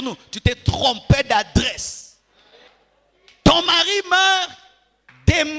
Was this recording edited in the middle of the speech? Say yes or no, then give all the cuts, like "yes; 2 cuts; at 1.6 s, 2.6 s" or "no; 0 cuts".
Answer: yes; 1 cut; at 2.7 s